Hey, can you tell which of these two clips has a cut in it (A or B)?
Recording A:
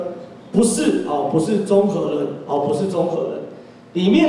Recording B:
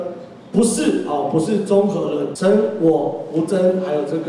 B